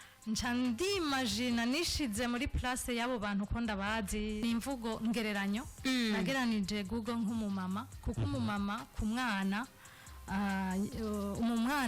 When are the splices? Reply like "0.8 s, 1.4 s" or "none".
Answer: 4.4 s